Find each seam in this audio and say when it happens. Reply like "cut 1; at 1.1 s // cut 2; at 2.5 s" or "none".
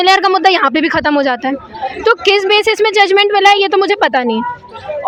none